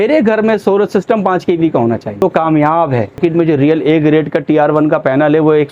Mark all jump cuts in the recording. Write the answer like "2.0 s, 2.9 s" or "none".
2.2 s, 3.2 s